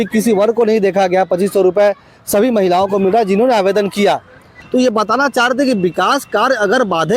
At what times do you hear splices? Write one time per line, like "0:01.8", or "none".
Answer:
0:04.6